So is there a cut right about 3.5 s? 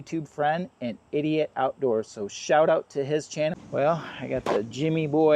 yes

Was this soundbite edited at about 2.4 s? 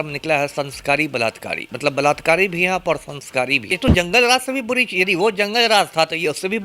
no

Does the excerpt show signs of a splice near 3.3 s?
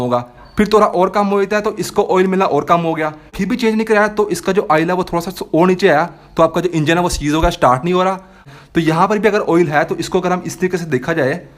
yes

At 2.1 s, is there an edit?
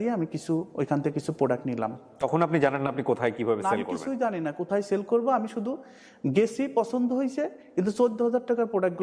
no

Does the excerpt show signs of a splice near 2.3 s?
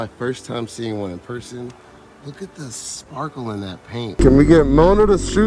no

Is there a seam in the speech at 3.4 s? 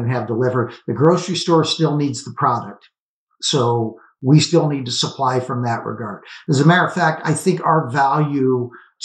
no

